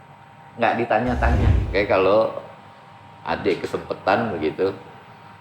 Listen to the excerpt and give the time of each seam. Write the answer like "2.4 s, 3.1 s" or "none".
1.5 s